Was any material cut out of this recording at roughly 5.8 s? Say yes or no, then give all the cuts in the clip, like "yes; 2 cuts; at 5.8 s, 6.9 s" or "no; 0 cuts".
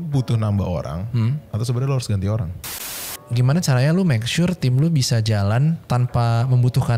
yes; 2 cuts; at 3.2 s, 5.8 s